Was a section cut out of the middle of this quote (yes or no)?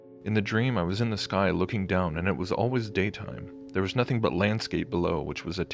yes